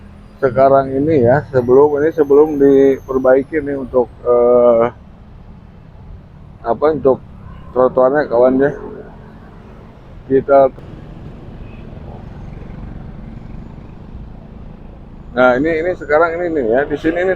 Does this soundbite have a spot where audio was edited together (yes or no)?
yes